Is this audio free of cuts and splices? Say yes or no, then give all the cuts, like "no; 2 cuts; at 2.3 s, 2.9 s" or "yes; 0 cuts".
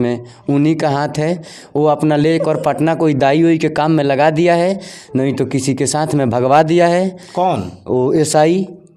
yes; 0 cuts